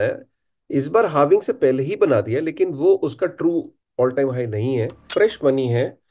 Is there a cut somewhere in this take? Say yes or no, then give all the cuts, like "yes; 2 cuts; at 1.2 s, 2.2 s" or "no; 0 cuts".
yes; 1 cut; at 5.0 s